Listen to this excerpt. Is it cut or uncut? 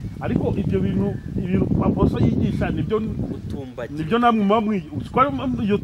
uncut